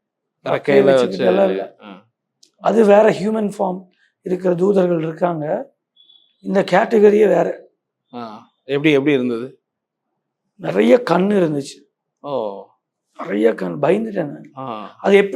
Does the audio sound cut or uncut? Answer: uncut